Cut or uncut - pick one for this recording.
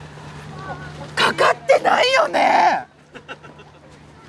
uncut